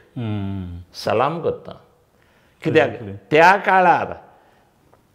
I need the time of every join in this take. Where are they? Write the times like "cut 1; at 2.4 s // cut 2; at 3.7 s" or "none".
none